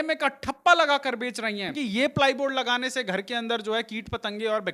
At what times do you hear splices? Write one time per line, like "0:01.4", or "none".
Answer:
0:01.7